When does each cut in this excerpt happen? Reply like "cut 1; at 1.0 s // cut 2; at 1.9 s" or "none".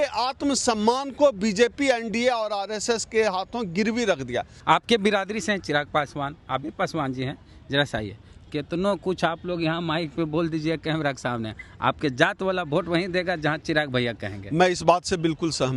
cut 1; at 4.5 s